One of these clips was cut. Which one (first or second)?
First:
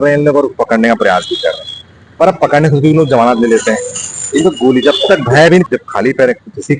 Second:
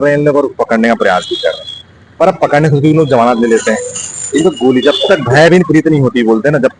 first